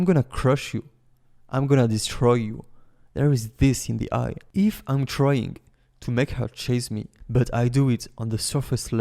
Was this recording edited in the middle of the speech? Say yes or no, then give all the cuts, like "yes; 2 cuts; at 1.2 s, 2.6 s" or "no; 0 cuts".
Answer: yes; 1 cut; at 4.4 s